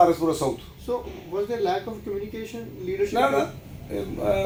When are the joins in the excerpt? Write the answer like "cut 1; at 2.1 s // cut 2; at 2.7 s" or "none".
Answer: none